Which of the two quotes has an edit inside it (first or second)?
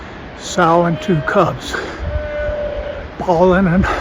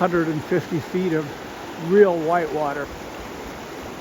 second